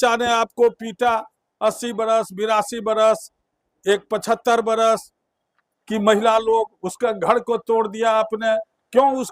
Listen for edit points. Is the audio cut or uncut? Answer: uncut